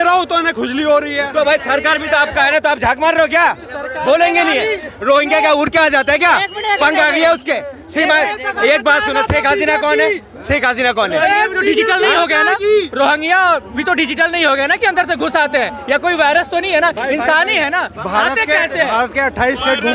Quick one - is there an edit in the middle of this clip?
no; 0 cuts

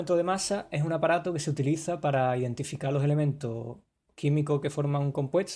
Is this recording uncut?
yes; 0 cuts

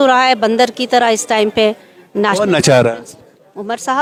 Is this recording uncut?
yes; 0 cuts

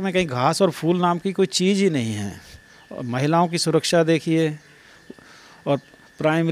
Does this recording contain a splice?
no; 0 cuts

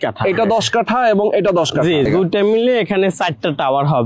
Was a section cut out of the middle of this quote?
yes; 1 cut; at 2.1 s

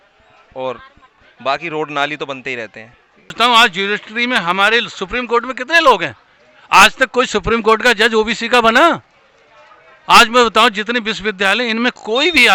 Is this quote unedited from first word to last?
no; 1 cut; at 3.3 s

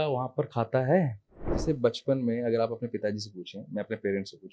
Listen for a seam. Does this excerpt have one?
yes; 1 cut; at 1.5 s

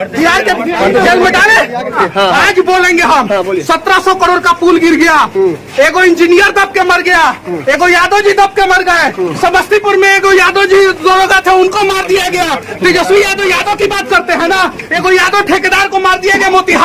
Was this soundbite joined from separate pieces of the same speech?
yes; 1 cut; at 2.0 s

